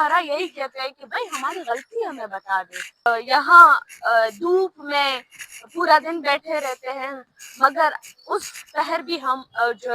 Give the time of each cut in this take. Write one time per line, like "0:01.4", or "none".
0:03.1